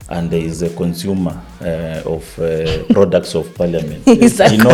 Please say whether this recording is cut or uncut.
uncut